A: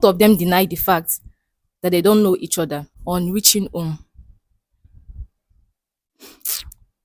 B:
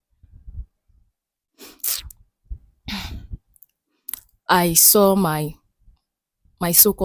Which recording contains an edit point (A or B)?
A